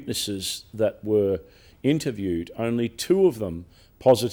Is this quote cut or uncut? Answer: uncut